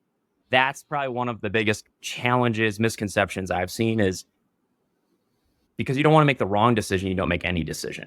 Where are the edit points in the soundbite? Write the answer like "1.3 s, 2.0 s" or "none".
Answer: 1.9 s, 5.6 s